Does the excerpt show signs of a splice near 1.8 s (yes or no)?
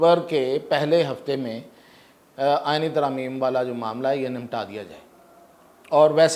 no